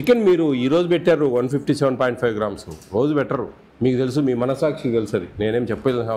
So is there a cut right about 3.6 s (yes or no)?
yes